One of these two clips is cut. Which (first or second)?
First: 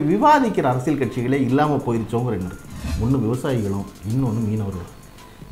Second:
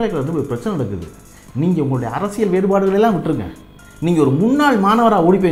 first